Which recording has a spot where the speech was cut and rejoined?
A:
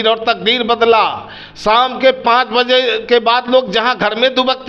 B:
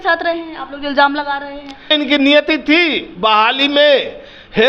B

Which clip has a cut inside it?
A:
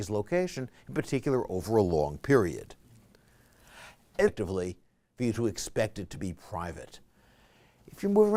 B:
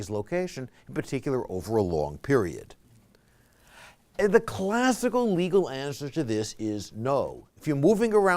B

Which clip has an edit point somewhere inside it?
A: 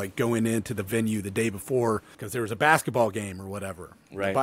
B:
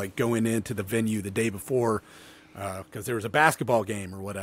A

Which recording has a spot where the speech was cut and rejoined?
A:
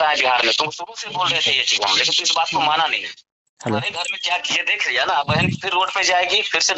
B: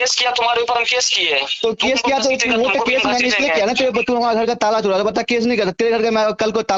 A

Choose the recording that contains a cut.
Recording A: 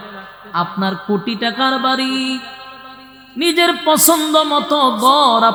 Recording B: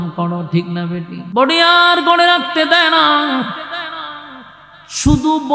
B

